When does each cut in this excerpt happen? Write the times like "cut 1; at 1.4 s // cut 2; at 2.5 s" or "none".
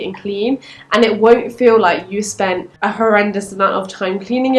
cut 1; at 2.7 s